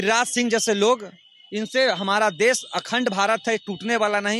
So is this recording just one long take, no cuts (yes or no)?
yes